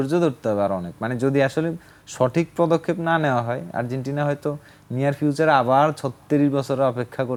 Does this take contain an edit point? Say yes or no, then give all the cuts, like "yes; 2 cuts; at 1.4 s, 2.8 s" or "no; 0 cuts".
no; 0 cuts